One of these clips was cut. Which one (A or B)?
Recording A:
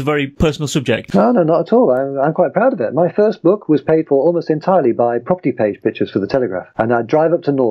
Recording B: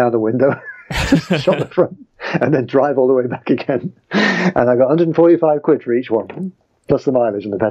A